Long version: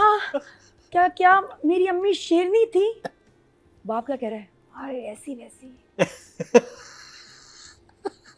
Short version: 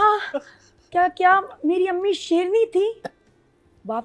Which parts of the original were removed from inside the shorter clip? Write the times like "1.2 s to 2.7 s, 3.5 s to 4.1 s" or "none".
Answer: none